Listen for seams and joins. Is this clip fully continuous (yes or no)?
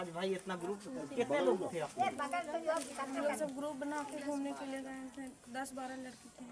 yes